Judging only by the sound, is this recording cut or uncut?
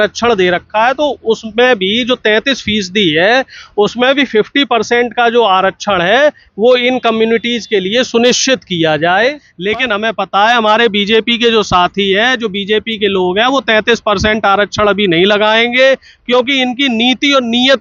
cut